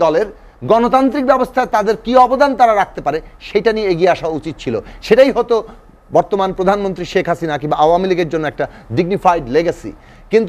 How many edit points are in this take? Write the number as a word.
zero